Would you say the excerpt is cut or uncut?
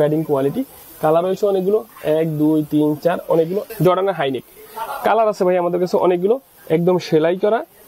cut